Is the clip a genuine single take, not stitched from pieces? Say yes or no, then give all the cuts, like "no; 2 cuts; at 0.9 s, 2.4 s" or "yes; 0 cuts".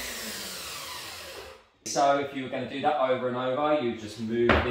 no; 1 cut; at 1.9 s